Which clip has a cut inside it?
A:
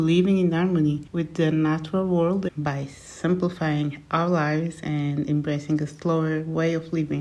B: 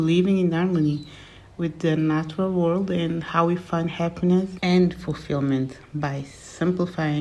A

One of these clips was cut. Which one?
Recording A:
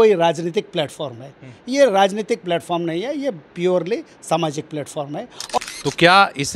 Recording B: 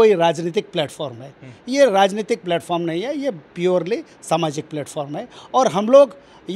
A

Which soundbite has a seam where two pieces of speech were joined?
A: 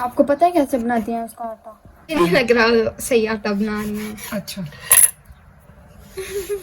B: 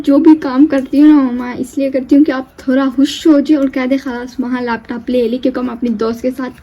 A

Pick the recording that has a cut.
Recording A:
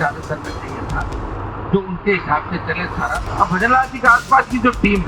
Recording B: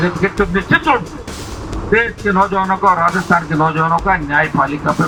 A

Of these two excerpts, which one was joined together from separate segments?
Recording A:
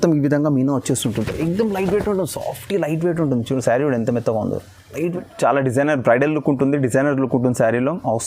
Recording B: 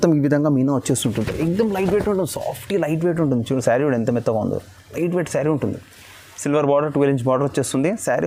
A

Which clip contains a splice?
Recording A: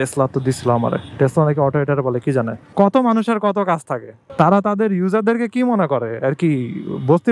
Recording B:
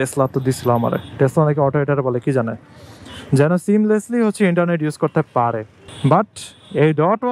A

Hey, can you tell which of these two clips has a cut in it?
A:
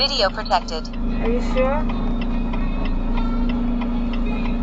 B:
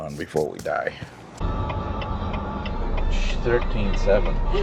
B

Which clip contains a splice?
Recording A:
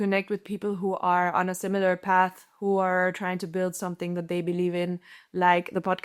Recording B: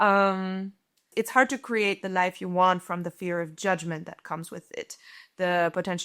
B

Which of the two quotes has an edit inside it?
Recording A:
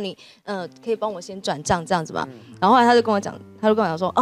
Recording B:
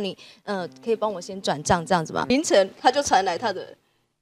B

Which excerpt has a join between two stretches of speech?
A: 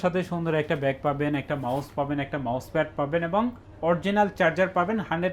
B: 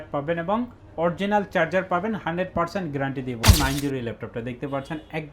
B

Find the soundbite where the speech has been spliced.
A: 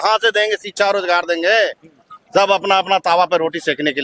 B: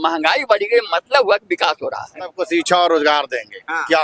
B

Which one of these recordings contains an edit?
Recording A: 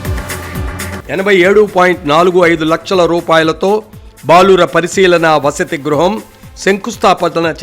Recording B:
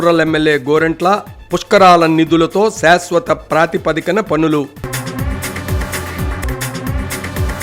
A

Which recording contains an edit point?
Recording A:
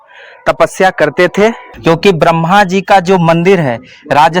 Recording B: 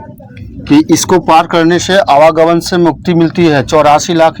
A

